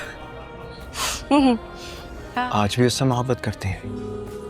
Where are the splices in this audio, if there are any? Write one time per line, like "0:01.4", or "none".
0:02.2

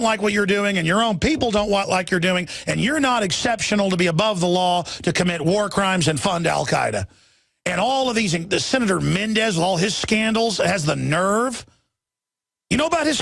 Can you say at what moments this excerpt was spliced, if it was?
0:01.6

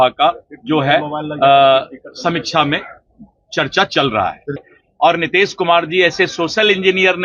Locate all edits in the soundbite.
0:04.7

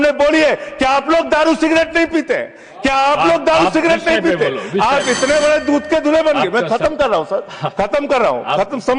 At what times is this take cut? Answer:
none

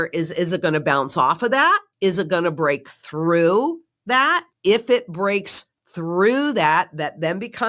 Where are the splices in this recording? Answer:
0:01.9
0:04.5

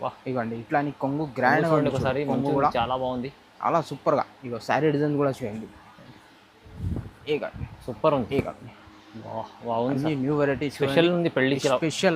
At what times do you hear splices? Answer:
0:08.3

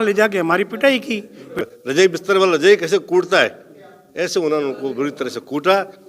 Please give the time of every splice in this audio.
0:01.6

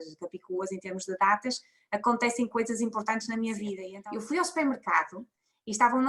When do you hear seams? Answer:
0:03.8

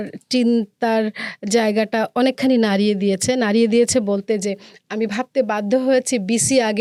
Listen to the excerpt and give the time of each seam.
none

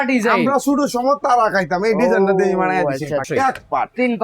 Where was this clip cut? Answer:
0:03.3

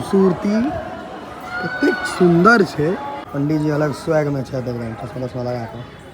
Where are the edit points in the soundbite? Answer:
0:03.2

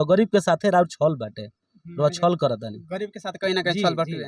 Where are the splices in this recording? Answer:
none

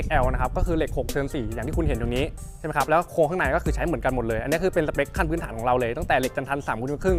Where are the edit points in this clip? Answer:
none

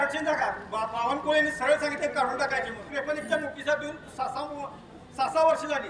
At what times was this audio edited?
0:02.9

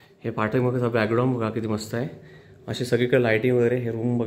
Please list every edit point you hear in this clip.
none

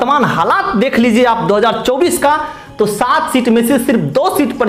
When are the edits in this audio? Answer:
none

